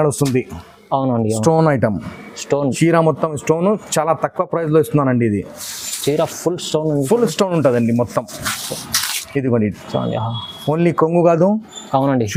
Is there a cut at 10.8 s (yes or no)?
no